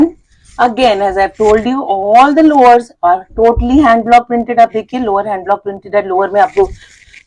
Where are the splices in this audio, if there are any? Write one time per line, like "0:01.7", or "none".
none